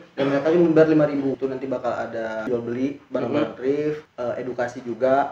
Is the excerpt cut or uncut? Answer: cut